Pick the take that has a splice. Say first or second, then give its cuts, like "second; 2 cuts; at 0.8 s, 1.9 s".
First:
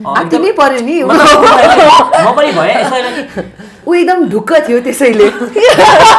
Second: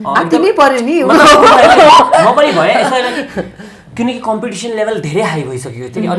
first; 1 cut; at 3.8 s